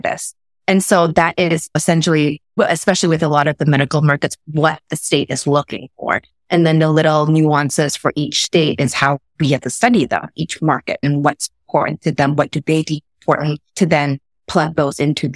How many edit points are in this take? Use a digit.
2